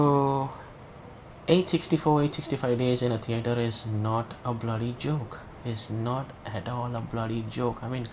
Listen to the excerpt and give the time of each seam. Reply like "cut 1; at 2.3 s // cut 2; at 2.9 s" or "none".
none